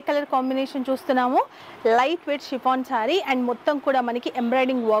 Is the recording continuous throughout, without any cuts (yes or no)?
no